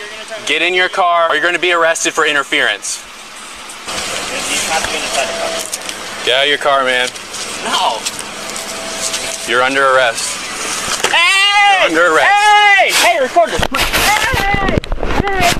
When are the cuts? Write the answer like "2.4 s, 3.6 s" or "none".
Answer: 1.4 s, 3.8 s